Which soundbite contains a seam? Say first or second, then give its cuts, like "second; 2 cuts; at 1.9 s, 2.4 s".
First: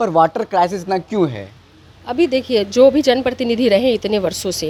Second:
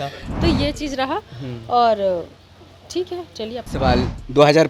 second; 1 cut; at 3.7 s